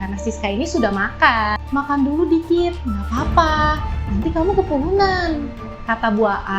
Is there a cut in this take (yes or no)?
yes